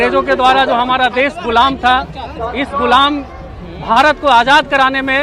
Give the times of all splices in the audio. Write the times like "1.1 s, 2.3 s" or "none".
none